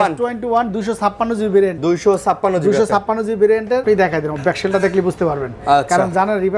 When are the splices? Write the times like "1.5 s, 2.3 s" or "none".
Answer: 1.8 s, 3.8 s